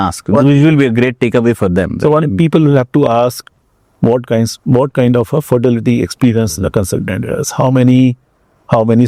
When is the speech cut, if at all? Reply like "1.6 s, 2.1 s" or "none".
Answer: none

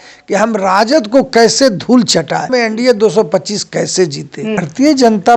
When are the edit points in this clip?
2.5 s, 4.6 s

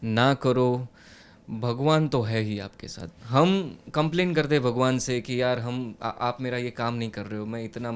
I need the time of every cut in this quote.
3.1 s

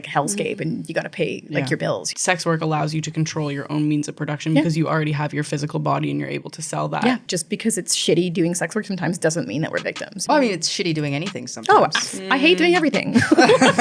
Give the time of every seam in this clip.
2.1 s, 7.2 s, 10.2 s

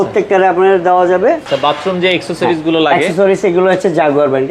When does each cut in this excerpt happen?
1.5 s

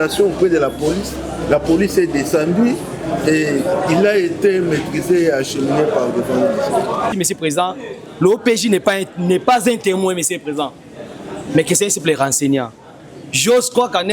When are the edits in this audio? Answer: 7.1 s

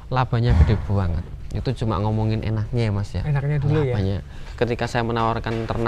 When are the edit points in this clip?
4.4 s

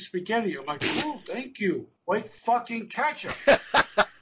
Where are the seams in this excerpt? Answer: 3.3 s

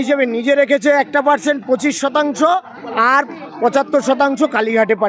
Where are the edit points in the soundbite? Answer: none

